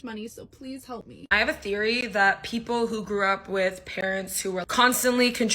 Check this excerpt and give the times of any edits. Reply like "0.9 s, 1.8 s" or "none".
1.2 s